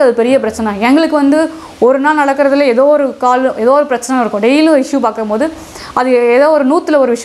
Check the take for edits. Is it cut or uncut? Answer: uncut